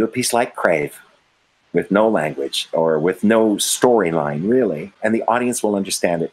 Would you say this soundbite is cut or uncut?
uncut